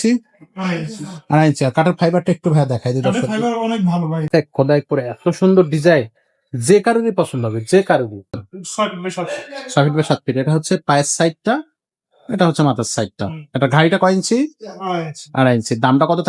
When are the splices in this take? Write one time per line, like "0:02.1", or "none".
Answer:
0:04.3
0:08.4